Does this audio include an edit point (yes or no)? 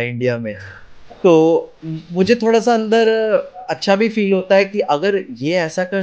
no